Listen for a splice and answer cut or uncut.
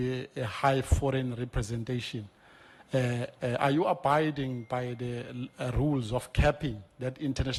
uncut